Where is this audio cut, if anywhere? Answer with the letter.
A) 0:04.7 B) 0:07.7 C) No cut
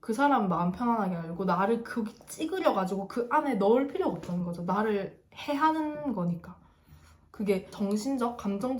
B